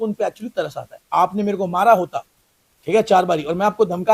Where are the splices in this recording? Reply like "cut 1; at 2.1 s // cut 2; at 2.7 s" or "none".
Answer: cut 1; at 0.9 s